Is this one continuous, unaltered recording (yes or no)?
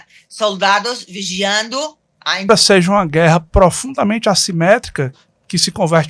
no